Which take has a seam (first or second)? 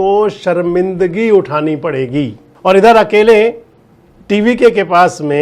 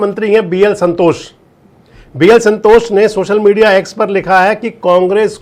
first